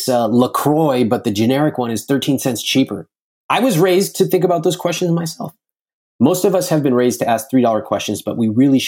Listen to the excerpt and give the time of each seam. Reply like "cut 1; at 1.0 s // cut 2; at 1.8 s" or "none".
none